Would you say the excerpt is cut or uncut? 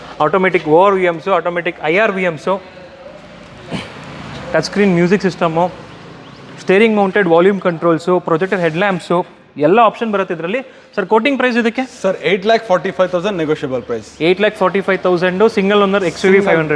uncut